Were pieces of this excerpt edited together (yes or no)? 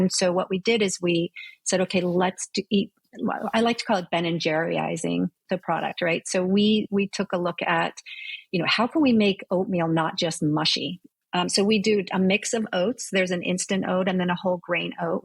no